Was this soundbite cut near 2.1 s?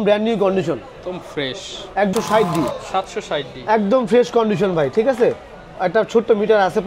yes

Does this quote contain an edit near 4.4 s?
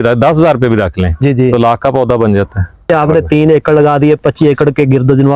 no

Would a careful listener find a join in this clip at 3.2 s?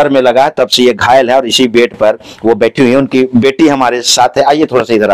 no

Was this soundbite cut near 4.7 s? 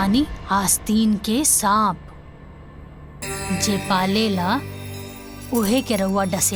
no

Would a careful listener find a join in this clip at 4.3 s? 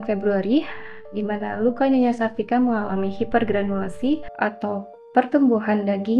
yes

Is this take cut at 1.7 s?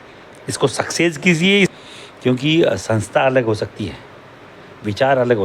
yes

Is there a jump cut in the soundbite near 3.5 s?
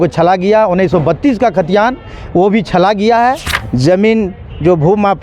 yes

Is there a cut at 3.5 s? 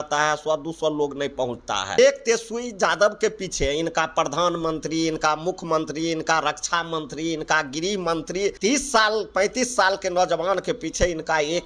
no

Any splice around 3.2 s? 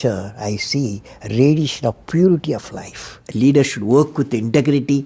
yes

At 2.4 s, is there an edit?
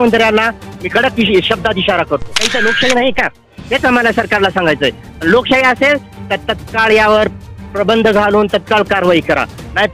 yes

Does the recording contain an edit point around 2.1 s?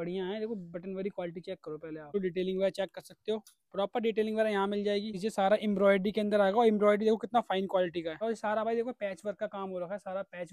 yes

